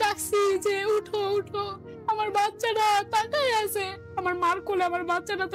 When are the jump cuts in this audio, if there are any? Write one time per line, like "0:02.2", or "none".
none